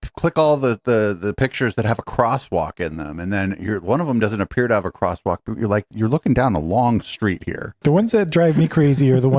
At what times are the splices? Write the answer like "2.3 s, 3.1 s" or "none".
7.7 s